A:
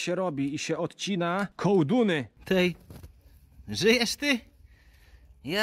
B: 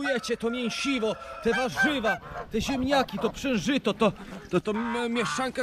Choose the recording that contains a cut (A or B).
A